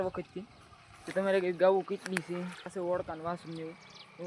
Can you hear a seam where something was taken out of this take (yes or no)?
yes